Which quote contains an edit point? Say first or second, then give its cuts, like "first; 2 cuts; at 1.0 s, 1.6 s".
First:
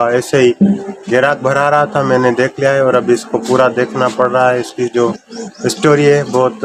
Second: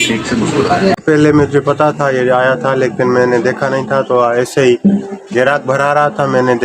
second; 1 cut; at 1.0 s